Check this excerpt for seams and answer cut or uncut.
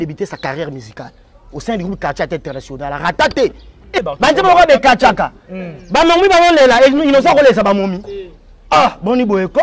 cut